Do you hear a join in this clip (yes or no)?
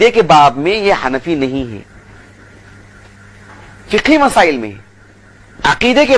no